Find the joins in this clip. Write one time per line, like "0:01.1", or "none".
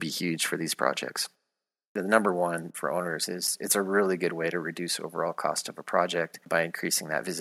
0:01.9